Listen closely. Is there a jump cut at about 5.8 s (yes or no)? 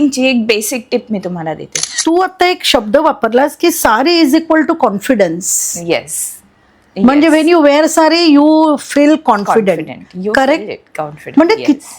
no